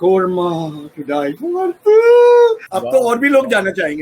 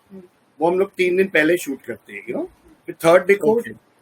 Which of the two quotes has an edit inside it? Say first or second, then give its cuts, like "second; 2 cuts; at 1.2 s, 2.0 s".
first; 1 cut; at 2.7 s